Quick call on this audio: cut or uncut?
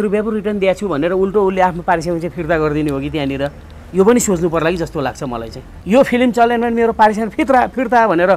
cut